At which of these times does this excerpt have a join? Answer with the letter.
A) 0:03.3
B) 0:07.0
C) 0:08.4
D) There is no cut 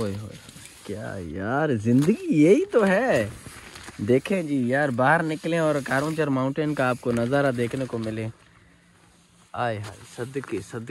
D